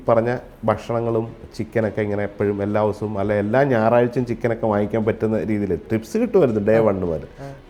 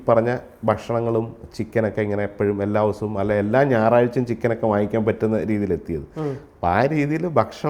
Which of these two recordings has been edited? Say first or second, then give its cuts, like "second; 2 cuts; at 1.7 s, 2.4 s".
first; 1 cut; at 5.8 s